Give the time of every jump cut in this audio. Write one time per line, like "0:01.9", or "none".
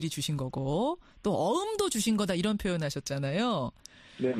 0:01.3

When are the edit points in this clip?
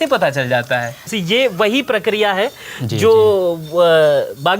0:01.1

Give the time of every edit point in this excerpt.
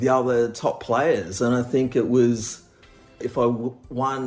0:03.3

